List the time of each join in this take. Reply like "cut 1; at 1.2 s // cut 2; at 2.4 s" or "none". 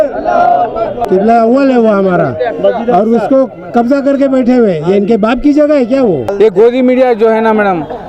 cut 1; at 1.0 s // cut 2; at 6.3 s